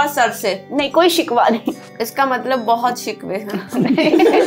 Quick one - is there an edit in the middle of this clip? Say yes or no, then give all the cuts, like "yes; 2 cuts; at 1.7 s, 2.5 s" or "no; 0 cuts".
yes; 1 cut; at 1.9 s